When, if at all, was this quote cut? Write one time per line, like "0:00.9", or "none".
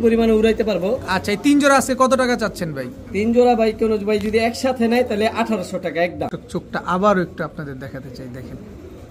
0:06.3